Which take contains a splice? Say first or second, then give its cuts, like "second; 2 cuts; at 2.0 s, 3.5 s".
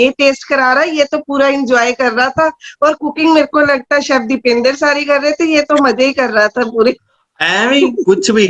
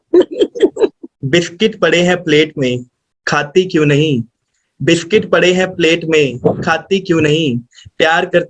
second; 1 cut; at 1.1 s